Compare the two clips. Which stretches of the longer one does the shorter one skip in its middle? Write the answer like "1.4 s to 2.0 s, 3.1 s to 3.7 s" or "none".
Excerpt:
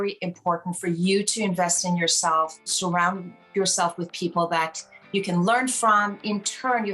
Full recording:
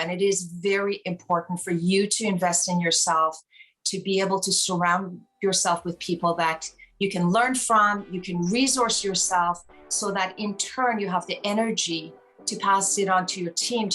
3.5 s to 4.6 s, 8.1 s to 10.3 s